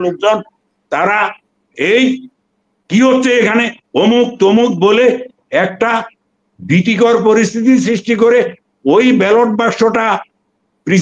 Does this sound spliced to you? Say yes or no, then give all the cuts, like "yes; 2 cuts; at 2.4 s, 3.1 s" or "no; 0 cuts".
no; 0 cuts